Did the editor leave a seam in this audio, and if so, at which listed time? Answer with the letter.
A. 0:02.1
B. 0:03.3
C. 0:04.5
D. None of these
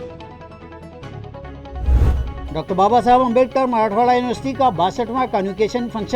A